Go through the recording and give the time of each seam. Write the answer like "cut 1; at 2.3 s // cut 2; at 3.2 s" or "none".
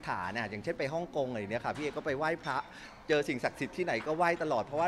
none